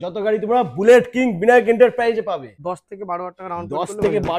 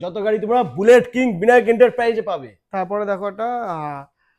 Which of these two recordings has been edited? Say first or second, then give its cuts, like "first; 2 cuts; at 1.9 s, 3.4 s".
first; 1 cut; at 2.5 s